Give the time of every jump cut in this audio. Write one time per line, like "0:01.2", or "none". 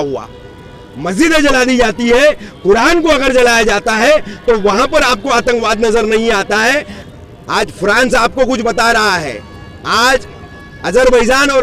0:07.0